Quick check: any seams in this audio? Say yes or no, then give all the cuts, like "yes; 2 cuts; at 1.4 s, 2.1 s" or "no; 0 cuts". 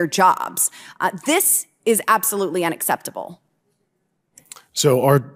no; 0 cuts